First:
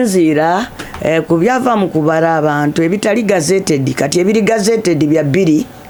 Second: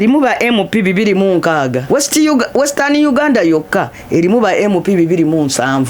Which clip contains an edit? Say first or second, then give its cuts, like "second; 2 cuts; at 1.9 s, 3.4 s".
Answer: second; 1 cut; at 1.8 s